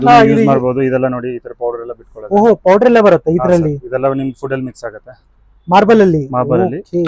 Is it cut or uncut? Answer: uncut